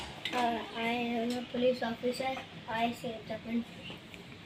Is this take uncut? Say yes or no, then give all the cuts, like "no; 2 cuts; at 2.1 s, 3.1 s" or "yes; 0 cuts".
yes; 0 cuts